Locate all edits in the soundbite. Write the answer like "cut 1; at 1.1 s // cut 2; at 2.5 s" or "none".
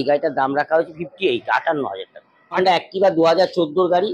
cut 1; at 2.6 s